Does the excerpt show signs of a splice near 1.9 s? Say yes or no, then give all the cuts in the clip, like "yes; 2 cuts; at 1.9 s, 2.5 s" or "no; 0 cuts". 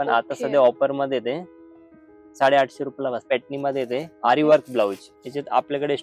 no; 2 cuts; at 3.2 s, 5.1 s